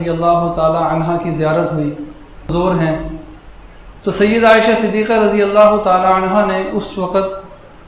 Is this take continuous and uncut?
no; 1 cut; at 2.5 s

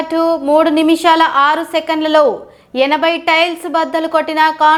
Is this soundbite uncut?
yes; 0 cuts

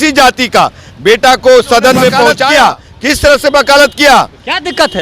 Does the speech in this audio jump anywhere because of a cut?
yes; 1 cut; at 2.4 s

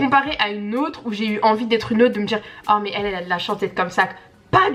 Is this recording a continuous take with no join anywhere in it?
yes; 0 cuts

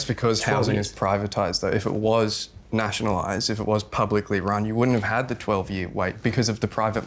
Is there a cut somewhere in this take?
yes; 1 cut; at 6.2 s

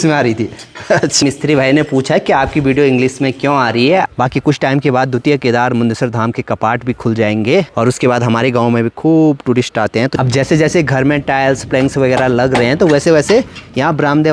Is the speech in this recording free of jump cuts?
no; 3 cuts; at 1.2 s, 4.1 s, 10.1 s

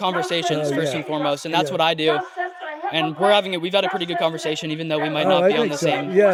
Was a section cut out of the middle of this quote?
no; 0 cuts

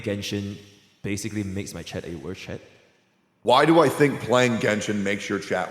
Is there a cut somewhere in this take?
yes; 1 cut; at 3.2 s

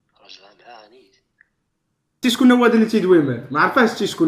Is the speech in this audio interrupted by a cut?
yes; 1 cut; at 2.1 s

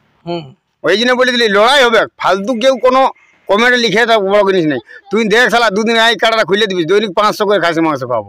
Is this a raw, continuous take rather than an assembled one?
yes; 0 cuts

